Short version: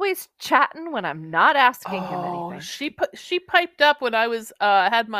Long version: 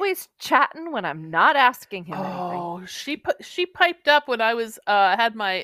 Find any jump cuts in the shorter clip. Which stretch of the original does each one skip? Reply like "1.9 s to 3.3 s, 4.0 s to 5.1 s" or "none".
1.9 s to 2.1 s

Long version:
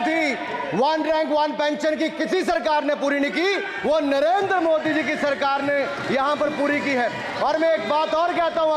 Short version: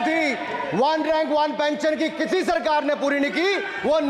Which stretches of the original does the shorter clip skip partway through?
none

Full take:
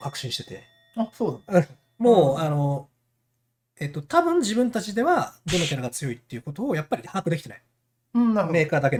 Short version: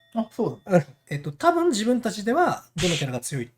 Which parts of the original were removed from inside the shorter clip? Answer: 1.8 s to 3.7 s

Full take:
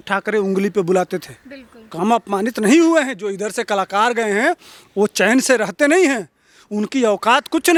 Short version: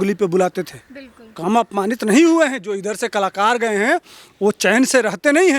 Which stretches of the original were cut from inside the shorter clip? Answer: none

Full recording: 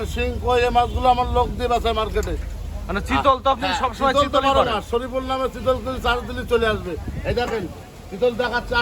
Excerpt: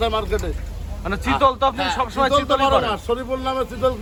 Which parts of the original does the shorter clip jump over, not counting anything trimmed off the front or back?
none

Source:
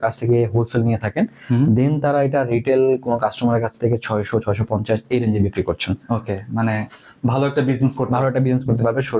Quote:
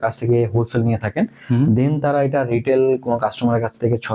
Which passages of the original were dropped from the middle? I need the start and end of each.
none

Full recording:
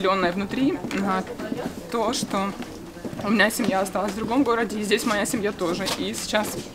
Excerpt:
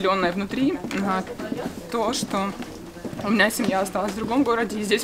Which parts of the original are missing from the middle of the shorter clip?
none

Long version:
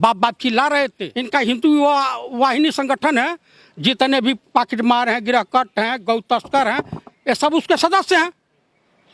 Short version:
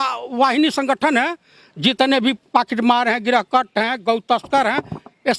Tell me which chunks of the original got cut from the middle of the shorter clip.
none

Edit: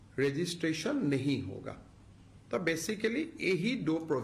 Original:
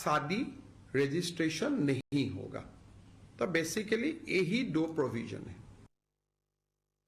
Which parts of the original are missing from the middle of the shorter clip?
2.0 s to 2.1 s

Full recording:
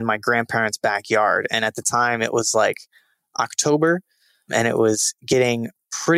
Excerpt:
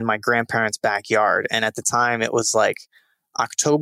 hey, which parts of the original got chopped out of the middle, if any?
none

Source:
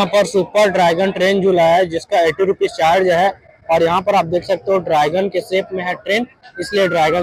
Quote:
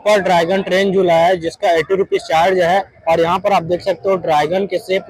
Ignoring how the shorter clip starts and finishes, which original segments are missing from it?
3.4 s to 3.6 s

